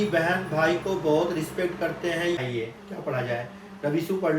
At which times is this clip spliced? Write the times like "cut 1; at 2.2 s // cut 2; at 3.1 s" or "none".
cut 1; at 2.4 s

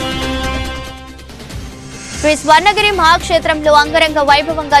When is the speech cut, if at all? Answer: cut 1; at 1.8 s

